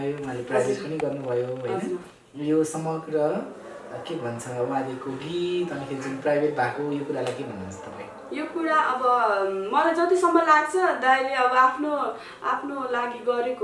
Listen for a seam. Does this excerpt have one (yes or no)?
no